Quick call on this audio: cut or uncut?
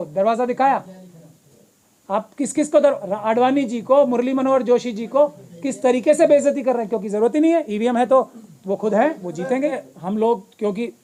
uncut